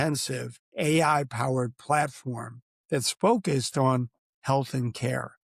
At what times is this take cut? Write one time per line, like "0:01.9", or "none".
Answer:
none